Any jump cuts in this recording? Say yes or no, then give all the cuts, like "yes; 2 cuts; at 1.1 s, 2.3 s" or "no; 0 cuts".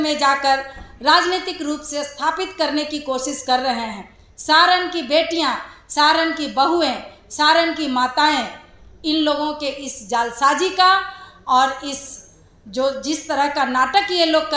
no; 0 cuts